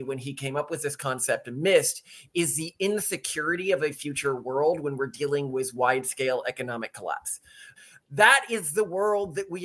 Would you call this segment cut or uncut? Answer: cut